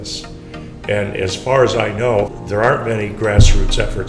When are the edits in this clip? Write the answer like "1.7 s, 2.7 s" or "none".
2.3 s